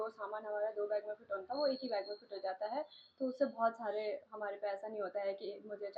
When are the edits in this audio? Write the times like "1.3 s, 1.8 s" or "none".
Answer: none